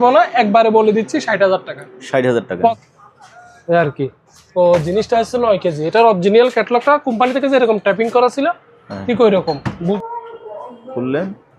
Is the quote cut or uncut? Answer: cut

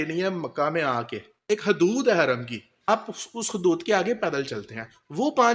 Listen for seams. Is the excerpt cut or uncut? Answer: cut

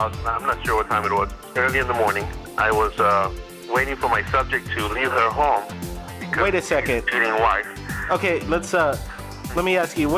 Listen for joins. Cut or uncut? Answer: uncut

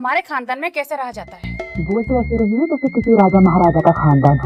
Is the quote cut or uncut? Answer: uncut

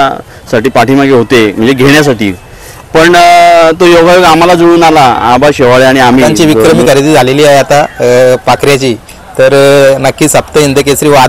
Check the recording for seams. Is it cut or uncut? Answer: cut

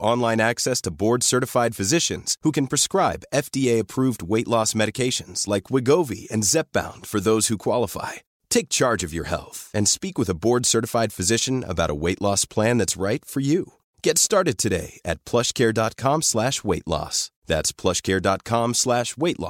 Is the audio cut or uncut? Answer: uncut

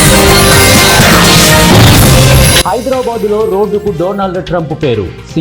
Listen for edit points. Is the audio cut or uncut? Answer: cut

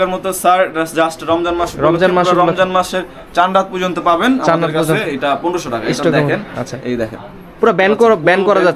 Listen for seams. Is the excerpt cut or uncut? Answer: uncut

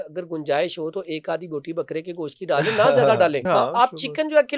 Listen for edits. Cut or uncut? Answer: cut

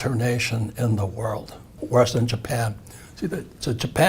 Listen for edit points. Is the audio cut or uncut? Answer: cut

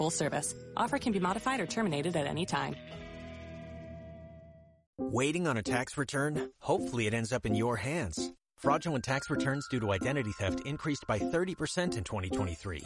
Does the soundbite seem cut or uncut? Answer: uncut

